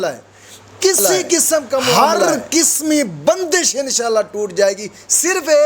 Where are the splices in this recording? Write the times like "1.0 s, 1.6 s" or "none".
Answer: 2.0 s